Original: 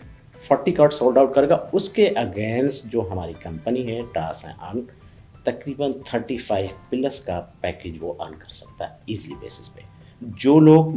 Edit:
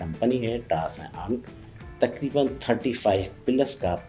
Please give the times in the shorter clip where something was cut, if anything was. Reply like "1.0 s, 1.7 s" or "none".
none